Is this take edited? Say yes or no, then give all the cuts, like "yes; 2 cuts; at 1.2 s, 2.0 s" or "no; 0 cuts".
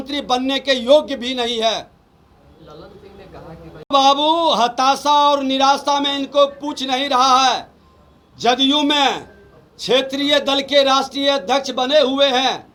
no; 0 cuts